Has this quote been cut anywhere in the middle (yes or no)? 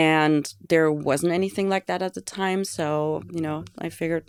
no